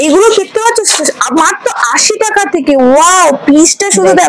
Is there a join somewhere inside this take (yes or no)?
no